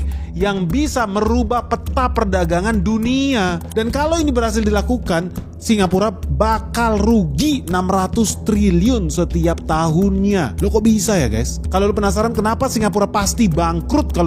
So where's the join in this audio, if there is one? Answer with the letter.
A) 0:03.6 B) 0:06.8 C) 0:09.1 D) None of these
D